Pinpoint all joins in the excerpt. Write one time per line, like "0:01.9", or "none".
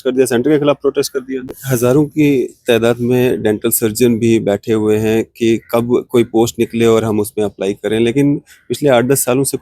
0:01.5